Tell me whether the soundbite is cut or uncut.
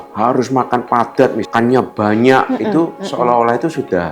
cut